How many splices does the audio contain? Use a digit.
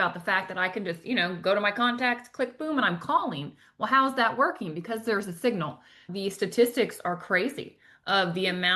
1